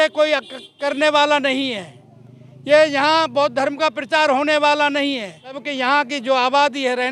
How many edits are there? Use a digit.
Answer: 1